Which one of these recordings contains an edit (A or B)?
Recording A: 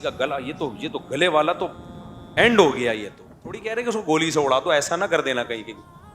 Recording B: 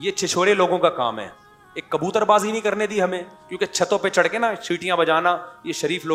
A